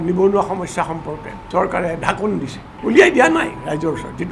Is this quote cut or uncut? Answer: cut